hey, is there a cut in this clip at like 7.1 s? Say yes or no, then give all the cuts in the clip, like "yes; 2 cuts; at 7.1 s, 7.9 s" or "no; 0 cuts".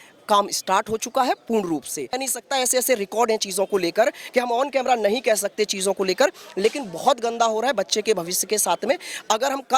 no; 1 cut; at 2.2 s